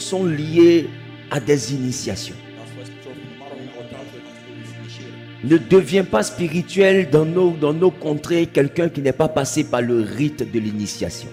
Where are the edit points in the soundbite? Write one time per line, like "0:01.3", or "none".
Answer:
none